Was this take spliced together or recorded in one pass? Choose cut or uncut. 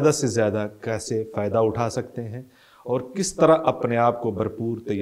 uncut